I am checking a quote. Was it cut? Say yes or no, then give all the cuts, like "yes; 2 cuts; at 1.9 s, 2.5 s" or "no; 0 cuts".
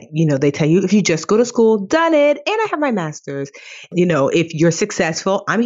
yes; 1 cut; at 3.8 s